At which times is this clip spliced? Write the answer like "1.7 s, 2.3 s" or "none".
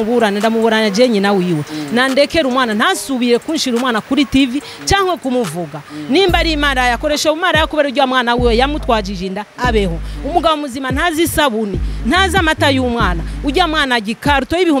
none